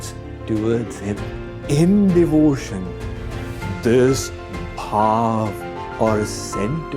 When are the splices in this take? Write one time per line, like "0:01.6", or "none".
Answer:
0:01.5